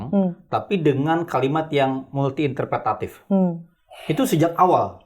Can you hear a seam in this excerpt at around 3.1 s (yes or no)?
no